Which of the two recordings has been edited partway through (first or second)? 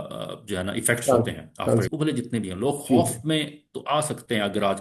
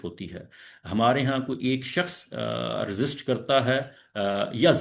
first